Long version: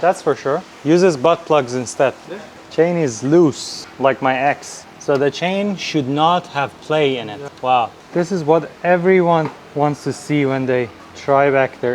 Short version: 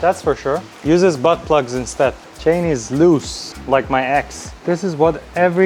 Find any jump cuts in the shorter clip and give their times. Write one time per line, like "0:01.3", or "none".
0:02.3
0:04.5